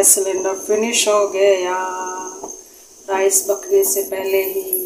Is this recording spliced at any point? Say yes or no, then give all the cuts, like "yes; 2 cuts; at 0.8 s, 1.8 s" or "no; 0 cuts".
no; 0 cuts